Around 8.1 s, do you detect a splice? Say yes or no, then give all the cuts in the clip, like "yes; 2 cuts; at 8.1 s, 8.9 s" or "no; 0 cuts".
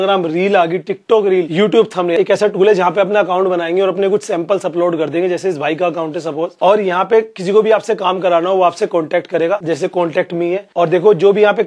no; 4 cuts; at 2.0 s, 6.5 s, 9.6 s, 10.7 s